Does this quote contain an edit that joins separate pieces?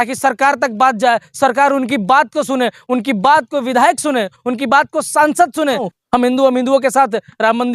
yes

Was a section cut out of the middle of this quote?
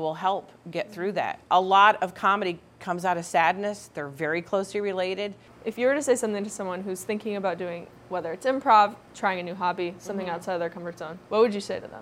yes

